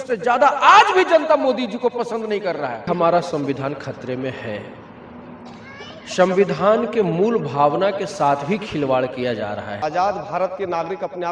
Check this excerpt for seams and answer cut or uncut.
cut